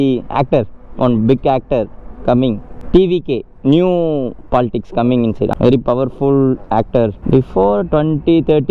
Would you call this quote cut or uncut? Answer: cut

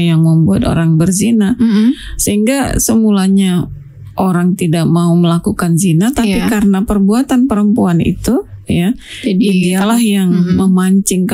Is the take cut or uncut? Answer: uncut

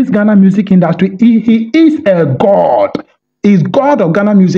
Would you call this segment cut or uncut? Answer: uncut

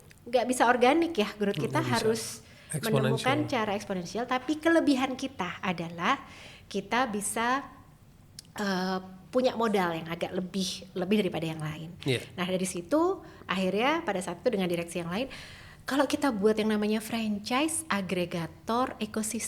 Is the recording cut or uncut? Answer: uncut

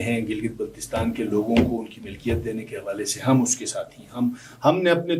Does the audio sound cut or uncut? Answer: uncut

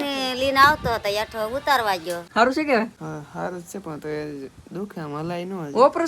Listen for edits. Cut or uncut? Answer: cut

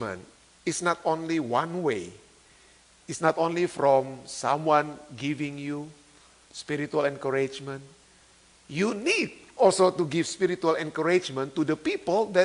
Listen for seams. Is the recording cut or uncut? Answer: uncut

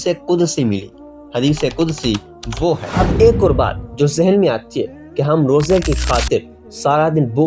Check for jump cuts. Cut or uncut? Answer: cut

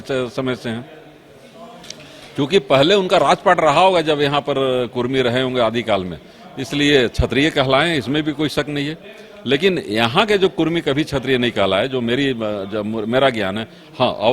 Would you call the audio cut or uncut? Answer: uncut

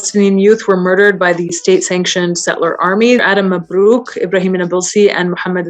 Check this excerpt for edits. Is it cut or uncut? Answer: cut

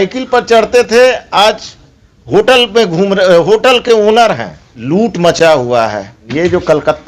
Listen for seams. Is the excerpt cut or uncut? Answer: cut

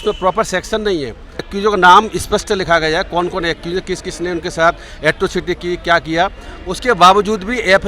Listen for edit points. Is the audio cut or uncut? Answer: cut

